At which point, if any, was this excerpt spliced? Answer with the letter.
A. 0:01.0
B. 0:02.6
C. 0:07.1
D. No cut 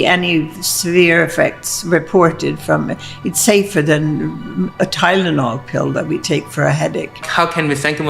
C